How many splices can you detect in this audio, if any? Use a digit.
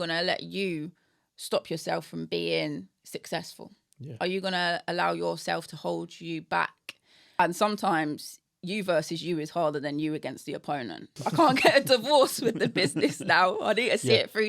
2